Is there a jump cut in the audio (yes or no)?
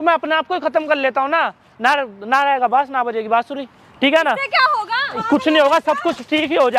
no